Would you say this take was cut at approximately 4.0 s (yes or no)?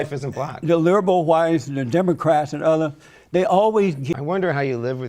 yes